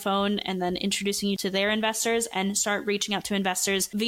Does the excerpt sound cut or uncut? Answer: cut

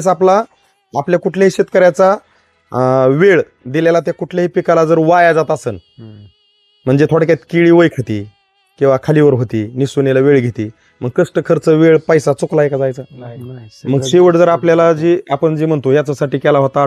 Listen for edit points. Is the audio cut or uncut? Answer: uncut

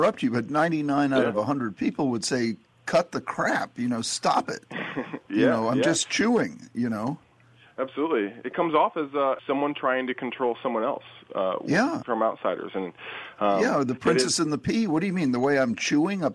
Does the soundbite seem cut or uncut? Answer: cut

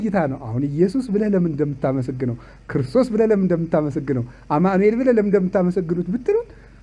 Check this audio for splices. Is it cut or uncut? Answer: uncut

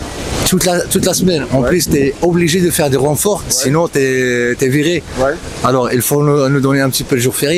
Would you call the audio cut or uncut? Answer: uncut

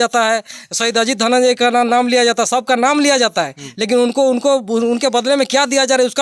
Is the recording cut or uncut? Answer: uncut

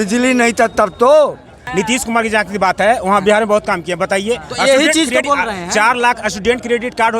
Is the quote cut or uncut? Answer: cut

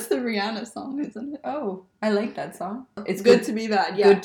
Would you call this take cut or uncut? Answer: cut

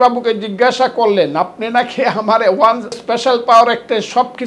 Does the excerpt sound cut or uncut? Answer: cut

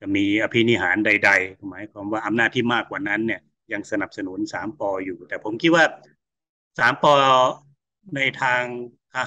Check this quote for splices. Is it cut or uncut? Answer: uncut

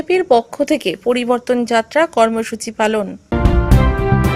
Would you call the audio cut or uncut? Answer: cut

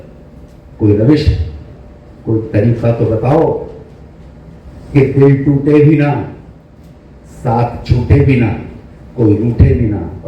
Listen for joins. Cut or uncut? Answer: uncut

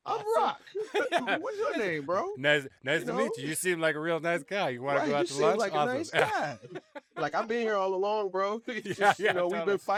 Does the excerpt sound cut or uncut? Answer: uncut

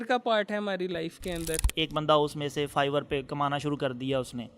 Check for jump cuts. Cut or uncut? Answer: cut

